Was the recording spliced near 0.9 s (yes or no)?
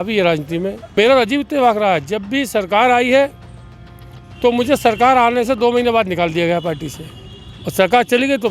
yes